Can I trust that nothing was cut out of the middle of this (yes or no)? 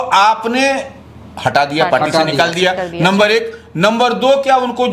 yes